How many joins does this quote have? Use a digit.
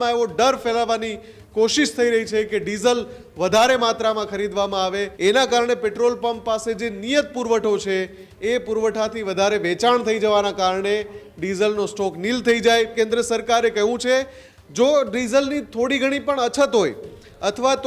2